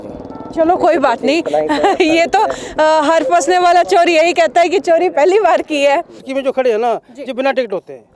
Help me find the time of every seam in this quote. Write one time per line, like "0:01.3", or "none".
0:06.3